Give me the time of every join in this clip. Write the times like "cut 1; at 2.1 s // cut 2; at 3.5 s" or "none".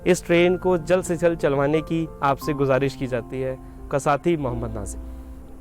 cut 1; at 3.8 s